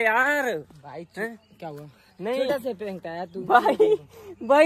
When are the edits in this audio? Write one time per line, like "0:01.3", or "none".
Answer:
none